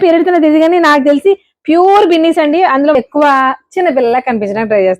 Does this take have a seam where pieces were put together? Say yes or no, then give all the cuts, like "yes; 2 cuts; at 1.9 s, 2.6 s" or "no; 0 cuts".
yes; 1 cut; at 3.0 s